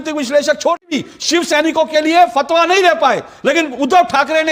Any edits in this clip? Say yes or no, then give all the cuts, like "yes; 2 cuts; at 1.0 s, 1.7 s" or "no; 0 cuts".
yes; 1 cut; at 0.9 s